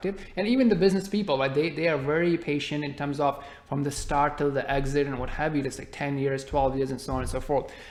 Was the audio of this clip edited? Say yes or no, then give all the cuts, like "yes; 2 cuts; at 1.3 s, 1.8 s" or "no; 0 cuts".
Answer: no; 0 cuts